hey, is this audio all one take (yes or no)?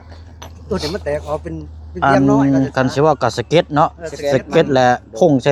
yes